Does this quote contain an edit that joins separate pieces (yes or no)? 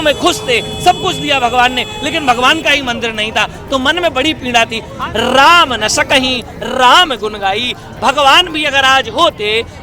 yes